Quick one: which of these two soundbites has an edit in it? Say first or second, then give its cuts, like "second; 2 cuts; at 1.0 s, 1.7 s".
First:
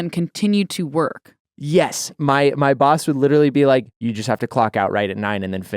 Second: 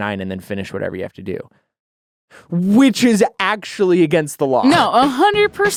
first; 2 cuts; at 2.1 s, 3.9 s